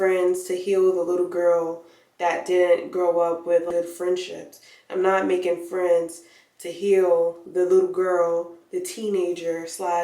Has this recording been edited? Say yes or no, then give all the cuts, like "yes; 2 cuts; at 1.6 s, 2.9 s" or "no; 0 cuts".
yes; 1 cut; at 3.7 s